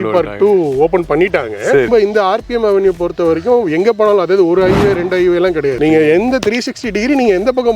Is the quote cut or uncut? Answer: cut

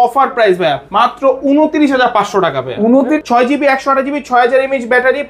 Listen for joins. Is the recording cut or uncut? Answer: cut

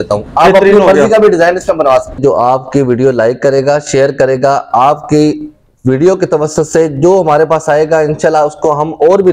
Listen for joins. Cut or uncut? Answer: cut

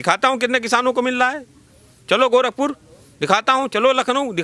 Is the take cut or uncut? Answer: uncut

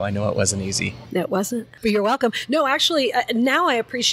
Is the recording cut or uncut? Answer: cut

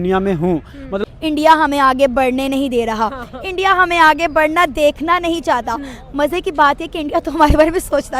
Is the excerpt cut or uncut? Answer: cut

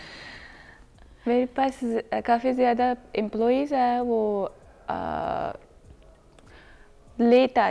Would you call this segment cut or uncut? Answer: uncut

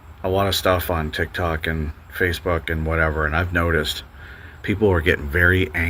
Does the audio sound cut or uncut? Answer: uncut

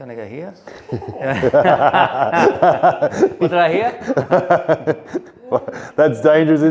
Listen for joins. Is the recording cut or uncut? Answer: uncut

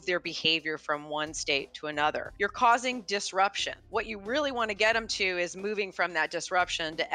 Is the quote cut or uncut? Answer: cut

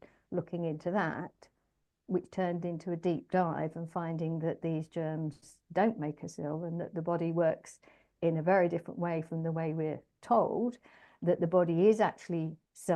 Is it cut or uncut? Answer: uncut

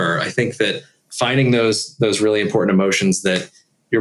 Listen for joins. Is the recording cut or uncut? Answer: uncut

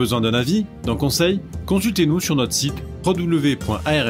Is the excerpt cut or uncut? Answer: uncut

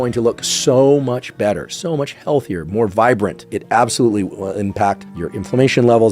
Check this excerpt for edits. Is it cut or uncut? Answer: cut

